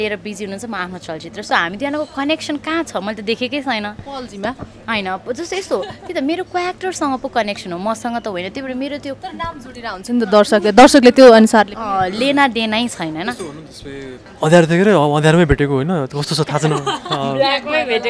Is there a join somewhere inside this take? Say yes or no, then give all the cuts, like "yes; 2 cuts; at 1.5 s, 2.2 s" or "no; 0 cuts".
yes; 1 cut; at 14.2 s